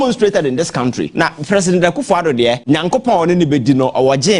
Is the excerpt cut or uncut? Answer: cut